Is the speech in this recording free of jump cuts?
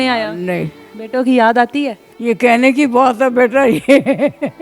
no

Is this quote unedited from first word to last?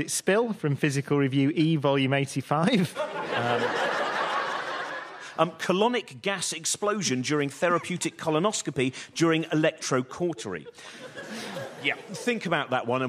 no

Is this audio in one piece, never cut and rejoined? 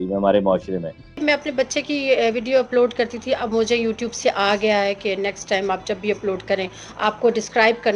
no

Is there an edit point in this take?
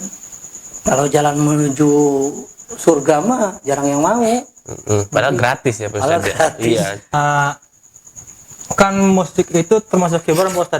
yes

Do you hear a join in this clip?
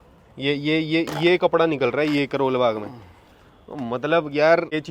no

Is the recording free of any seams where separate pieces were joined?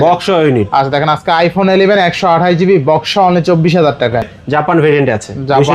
no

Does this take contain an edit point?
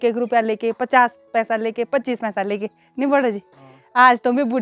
no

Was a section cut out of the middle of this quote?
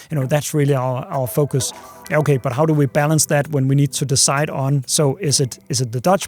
no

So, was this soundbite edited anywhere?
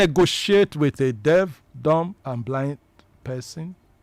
yes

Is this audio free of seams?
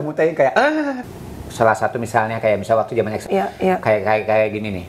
no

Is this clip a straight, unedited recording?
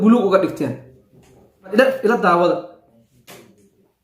no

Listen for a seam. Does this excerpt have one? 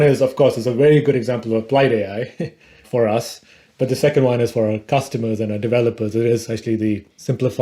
no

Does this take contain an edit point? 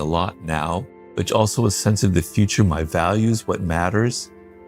no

